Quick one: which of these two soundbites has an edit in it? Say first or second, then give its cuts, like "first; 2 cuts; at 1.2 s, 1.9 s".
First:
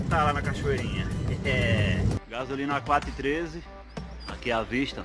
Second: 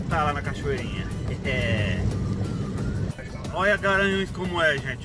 first; 1 cut; at 2.2 s